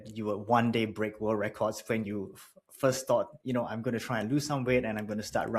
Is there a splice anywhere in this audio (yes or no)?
no